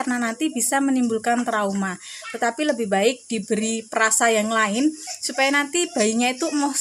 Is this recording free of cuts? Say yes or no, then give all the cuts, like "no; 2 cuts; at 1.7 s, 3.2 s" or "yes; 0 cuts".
yes; 0 cuts